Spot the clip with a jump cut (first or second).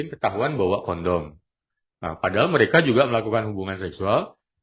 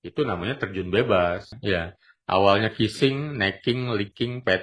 second